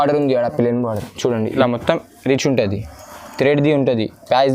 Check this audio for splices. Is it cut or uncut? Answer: cut